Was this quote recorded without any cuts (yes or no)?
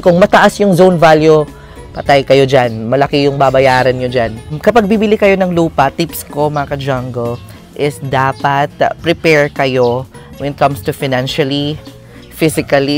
no